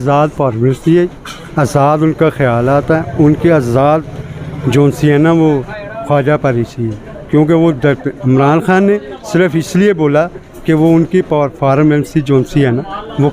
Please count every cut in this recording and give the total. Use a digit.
0